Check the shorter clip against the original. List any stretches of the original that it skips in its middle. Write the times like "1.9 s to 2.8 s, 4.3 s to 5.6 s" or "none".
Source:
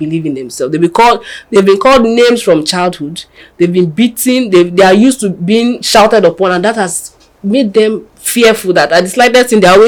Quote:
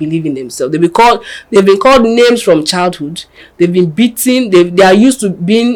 none